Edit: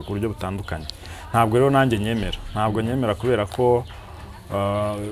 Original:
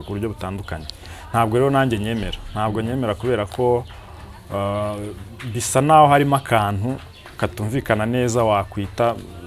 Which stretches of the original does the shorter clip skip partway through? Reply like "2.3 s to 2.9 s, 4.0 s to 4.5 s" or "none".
none